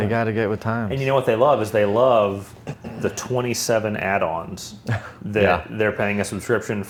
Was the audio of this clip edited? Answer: no; 0 cuts

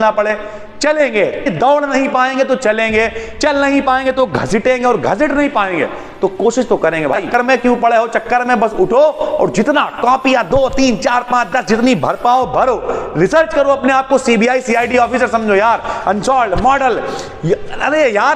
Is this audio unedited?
no; 2 cuts; at 1.5 s, 7.2 s

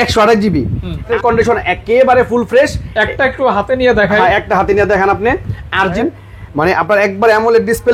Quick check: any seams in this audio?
yes; 2 cuts; at 1.1 s, 6.0 s

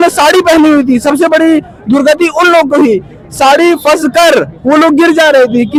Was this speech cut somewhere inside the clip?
no; 0 cuts

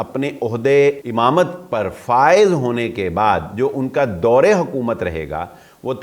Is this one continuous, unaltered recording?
no; 1 cut; at 1.0 s

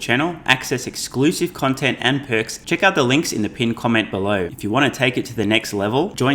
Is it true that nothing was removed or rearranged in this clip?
no; 2 cuts; at 2.6 s, 4.5 s

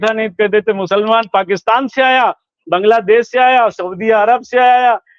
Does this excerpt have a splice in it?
no; 0 cuts

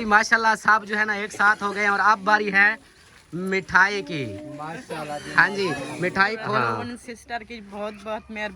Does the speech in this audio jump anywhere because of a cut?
yes; 1 cut; at 6.6 s

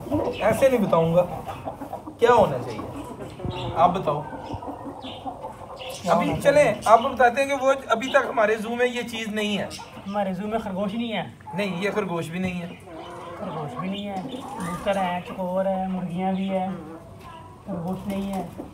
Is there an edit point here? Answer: no; 0 cuts

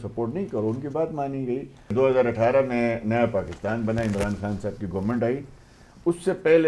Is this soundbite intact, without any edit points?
no; 1 cut; at 1.9 s

